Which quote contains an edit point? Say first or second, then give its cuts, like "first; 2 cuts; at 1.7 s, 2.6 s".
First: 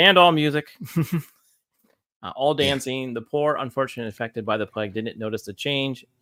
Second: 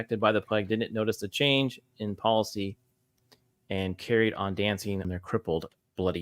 second; 1 cut; at 5.1 s